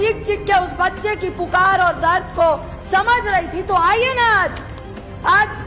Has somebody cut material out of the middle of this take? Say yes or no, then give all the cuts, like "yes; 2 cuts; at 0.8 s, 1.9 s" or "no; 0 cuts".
no; 0 cuts